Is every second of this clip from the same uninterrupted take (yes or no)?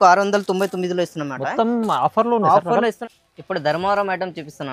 no